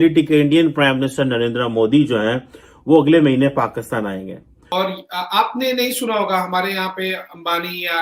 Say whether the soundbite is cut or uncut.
cut